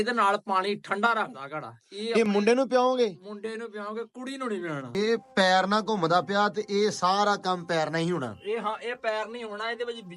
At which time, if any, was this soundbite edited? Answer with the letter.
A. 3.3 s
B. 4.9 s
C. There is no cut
B